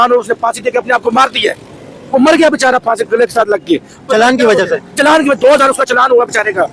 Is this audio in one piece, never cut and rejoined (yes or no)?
yes